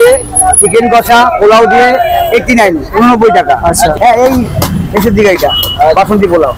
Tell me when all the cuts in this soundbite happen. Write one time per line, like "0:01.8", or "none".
0:03.9